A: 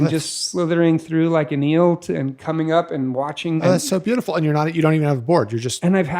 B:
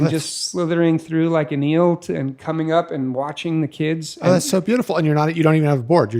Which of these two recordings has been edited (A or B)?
A